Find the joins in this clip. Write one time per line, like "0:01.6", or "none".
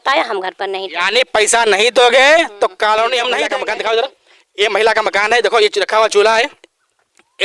0:03.5